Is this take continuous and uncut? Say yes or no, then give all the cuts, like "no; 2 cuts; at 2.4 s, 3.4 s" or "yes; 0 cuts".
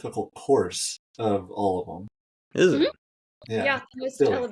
yes; 0 cuts